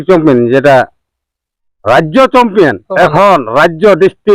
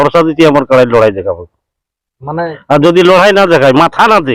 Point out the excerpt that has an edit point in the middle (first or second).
first